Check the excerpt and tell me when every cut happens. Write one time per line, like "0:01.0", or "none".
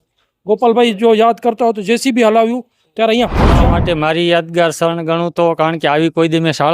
0:03.6